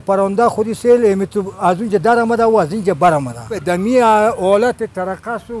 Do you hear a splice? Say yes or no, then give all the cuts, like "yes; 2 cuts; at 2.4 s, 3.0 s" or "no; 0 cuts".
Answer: yes; 1 cut; at 3.6 s